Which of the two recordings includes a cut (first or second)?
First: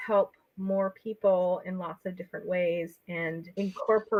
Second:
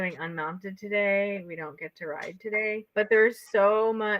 second